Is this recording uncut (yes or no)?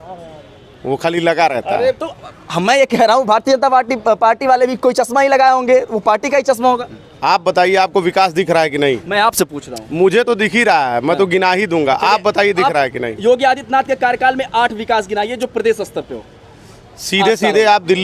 yes